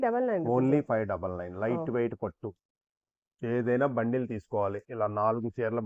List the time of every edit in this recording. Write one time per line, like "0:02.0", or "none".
0:02.7